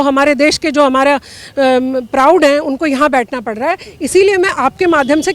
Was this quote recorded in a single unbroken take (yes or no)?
yes